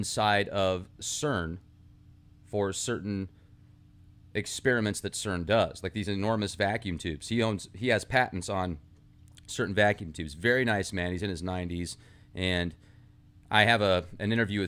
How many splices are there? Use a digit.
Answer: 0